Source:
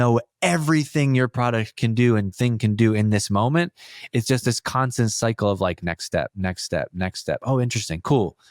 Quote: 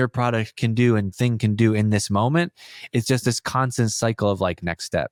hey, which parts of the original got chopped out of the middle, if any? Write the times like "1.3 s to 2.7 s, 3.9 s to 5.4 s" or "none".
none